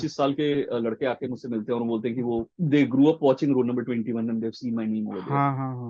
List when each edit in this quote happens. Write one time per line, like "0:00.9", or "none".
0:02.5